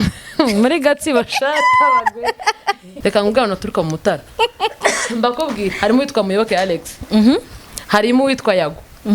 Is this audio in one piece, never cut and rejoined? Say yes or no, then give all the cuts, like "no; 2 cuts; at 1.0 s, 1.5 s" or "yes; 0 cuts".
no; 1 cut; at 2.9 s